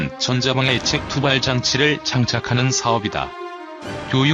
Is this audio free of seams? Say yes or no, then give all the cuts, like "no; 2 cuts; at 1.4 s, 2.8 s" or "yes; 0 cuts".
no; 1 cut; at 3.4 s